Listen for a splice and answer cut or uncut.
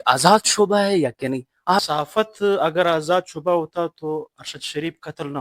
cut